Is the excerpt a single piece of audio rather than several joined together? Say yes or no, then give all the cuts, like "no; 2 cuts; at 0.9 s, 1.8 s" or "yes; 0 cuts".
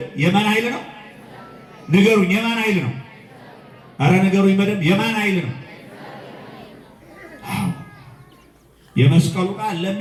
yes; 0 cuts